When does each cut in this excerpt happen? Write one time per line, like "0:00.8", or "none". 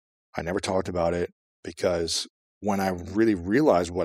none